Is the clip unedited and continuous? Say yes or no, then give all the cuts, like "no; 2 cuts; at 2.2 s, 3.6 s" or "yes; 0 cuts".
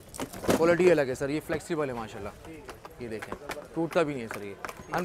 yes; 0 cuts